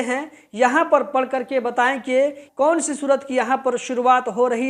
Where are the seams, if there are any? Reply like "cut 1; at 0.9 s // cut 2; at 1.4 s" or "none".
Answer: cut 1; at 2.4 s